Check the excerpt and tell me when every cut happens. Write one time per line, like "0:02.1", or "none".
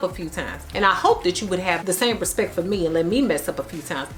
none